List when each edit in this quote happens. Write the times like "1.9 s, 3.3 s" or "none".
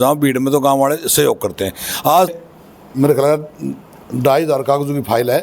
2.3 s